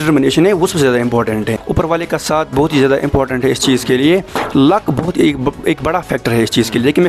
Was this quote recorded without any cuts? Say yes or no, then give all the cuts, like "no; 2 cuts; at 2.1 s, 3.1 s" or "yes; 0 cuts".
no; 1 cut; at 1.6 s